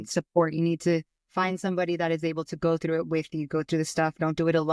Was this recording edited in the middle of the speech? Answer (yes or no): yes